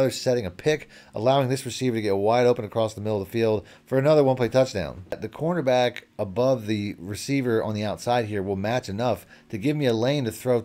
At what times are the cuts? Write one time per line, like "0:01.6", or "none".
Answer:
0:05.2